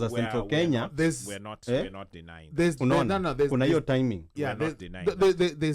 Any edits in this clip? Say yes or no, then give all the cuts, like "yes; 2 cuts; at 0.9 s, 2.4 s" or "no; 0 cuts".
no; 0 cuts